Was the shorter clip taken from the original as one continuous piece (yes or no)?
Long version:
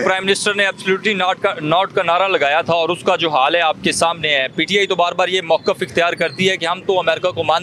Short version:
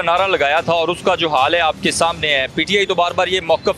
yes